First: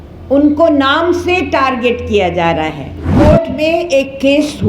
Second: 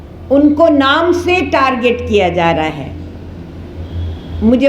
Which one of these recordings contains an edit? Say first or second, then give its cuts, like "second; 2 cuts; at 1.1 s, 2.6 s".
first; 1 cut; at 3.1 s